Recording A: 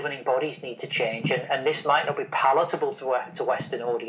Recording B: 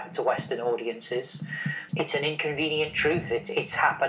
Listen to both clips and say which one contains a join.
B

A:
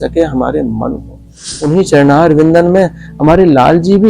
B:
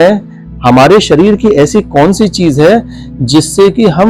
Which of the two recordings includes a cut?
A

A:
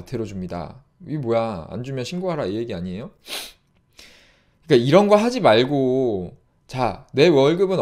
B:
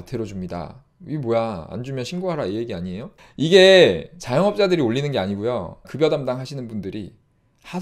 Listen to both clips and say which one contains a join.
B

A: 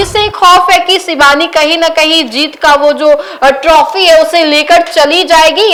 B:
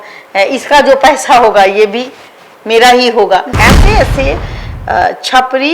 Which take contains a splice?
B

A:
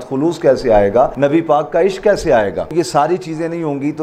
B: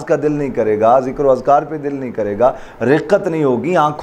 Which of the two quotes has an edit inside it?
A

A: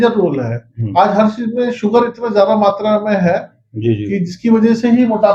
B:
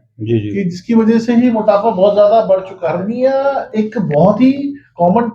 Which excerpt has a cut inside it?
B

